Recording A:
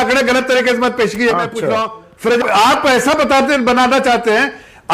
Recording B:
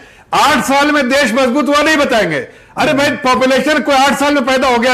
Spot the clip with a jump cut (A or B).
A